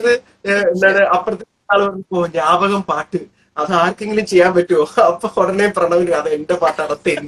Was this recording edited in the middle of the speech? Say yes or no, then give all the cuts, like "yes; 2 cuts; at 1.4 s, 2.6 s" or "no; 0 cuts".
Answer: no; 0 cuts